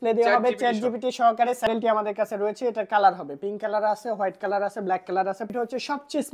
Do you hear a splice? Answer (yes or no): yes